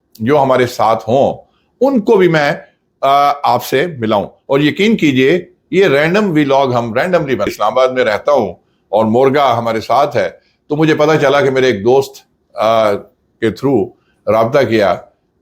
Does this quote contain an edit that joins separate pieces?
yes; 1 cut; at 7.5 s

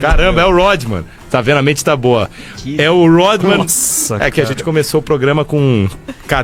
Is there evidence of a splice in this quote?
no; 0 cuts

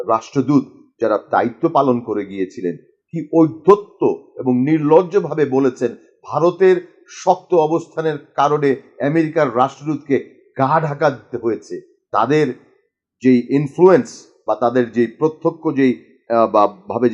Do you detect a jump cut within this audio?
no; 0 cuts

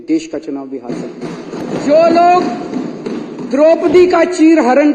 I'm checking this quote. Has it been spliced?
yes; 1 cut; at 1.6 s

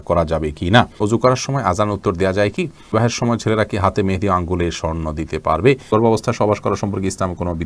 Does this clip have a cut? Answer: yes; 3 cuts; at 0.9 s, 2.9 s, 5.9 s

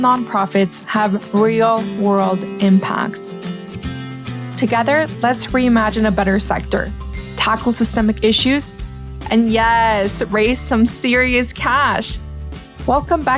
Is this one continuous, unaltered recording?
yes; 0 cuts

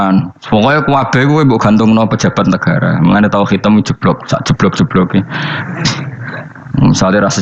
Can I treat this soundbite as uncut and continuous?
no; 1 cut; at 6.5 s

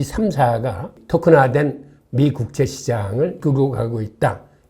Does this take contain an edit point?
yes; 1 cut; at 3.4 s

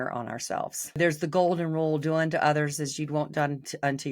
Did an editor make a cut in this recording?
yes; 1 cut; at 1.0 s

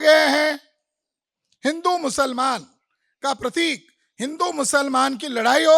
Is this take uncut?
yes; 0 cuts

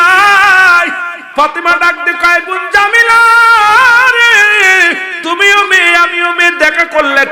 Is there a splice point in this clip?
yes; 1 cut; at 1.3 s

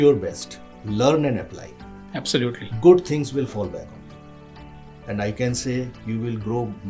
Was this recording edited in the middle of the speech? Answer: no; 0 cuts

